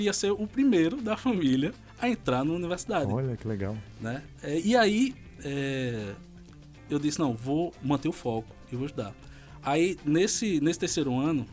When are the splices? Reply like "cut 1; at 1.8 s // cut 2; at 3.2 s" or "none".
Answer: none